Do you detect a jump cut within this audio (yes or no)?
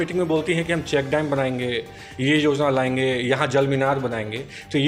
no